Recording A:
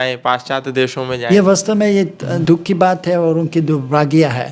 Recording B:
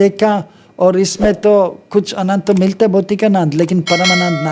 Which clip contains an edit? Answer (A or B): A